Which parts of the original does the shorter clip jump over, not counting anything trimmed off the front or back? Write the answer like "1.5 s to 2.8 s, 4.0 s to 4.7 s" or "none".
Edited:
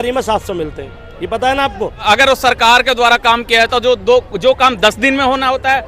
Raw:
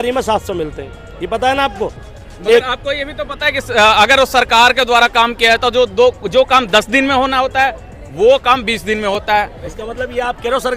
2.0 s to 3.9 s

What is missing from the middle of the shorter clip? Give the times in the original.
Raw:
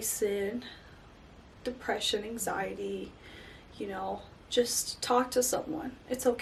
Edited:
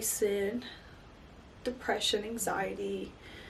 none

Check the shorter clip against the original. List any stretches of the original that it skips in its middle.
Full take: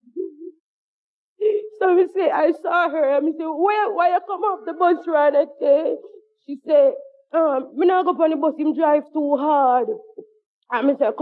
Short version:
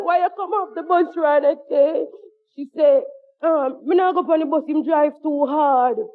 none

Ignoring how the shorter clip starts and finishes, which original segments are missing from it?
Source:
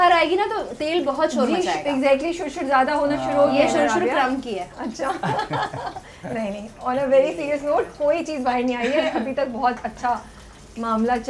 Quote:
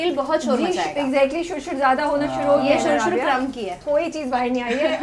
4.7 s to 7.9 s

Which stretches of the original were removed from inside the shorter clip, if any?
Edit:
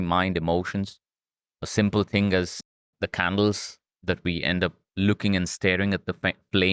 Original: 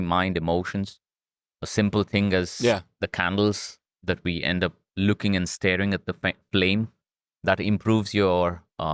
none

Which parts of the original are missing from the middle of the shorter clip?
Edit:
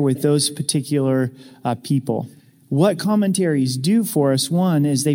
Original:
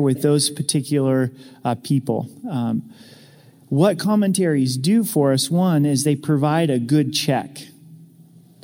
2.4 s to 3.4 s

